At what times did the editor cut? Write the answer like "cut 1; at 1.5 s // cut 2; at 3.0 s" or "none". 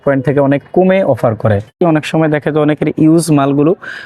cut 1; at 1.8 s